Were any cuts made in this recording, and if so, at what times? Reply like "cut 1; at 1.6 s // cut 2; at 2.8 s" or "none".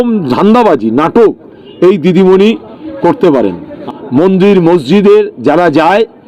cut 1; at 3.7 s